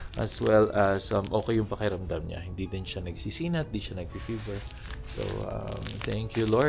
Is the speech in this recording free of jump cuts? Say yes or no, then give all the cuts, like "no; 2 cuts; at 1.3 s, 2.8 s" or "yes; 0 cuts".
yes; 0 cuts